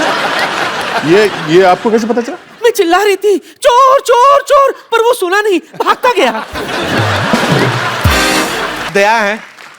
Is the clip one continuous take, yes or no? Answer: no